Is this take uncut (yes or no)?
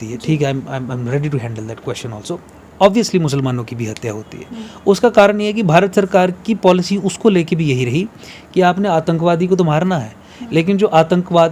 yes